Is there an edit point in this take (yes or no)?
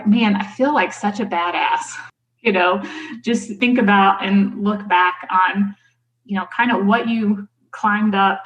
yes